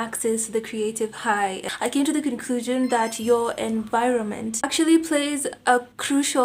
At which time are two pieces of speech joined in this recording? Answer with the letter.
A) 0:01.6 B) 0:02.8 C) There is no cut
A